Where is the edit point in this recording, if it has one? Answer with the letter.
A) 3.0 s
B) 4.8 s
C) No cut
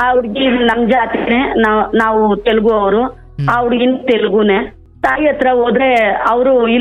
B